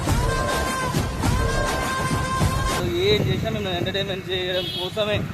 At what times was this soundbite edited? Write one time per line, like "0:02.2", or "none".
0:02.8